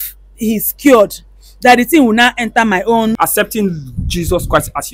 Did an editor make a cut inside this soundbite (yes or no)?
yes